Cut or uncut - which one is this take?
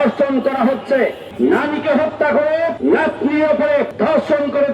cut